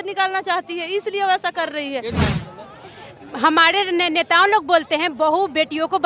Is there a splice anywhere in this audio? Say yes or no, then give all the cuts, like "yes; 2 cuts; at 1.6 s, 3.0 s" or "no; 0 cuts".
yes; 1 cut; at 2.1 s